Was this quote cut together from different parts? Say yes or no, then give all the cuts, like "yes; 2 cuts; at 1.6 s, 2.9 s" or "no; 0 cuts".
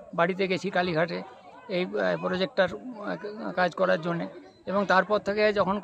no; 0 cuts